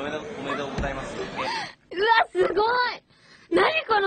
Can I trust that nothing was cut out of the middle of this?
no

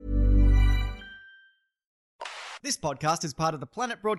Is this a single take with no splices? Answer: no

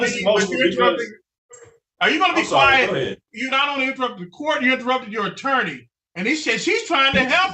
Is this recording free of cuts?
no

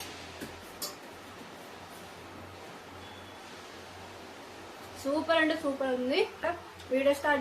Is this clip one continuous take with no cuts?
no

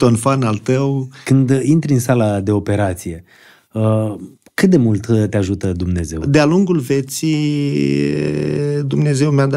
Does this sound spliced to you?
yes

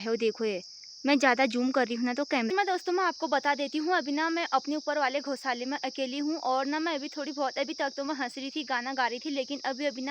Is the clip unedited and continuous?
no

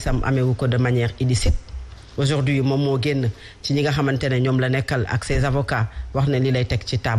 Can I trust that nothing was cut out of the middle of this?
yes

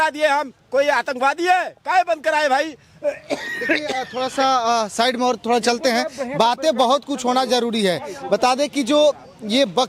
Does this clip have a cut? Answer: no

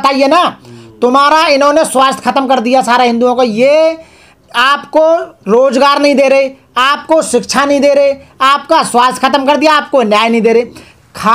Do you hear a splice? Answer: no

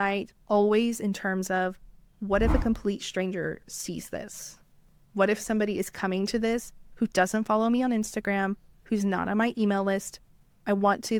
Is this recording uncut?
yes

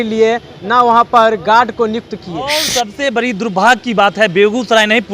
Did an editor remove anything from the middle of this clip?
yes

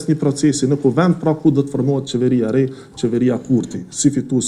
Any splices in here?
no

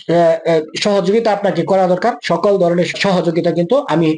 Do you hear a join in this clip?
yes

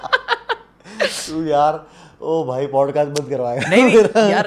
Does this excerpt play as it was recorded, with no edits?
yes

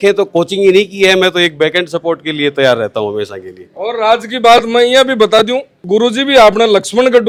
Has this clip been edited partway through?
no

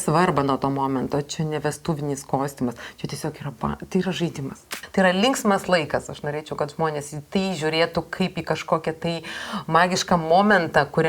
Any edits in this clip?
yes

